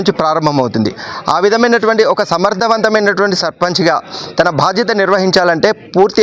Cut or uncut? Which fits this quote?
uncut